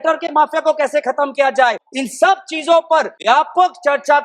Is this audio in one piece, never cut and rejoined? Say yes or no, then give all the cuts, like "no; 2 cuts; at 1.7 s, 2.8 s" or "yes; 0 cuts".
no; 2 cuts; at 1.8 s, 3.1 s